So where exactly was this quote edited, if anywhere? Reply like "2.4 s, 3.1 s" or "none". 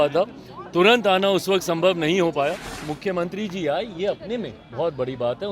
2.9 s